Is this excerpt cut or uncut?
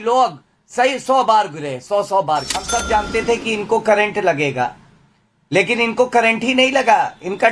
cut